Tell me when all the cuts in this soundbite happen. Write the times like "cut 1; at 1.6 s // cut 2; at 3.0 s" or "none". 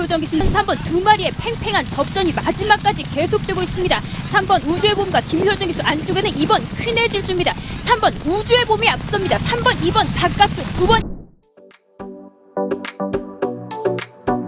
none